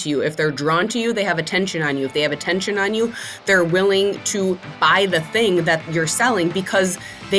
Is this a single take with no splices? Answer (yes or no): no